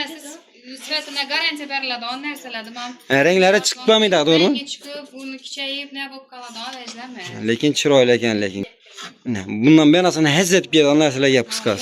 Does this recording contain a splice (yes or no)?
yes